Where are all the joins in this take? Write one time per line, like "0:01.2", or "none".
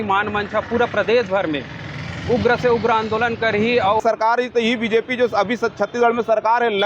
0:04.0